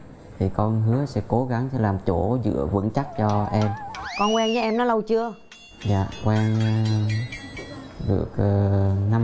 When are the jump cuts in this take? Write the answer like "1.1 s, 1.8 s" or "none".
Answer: none